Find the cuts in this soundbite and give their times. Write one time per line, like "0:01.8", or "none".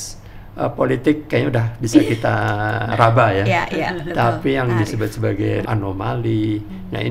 0:02.9
0:05.6